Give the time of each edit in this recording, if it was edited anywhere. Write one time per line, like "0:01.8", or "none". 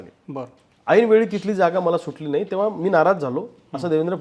none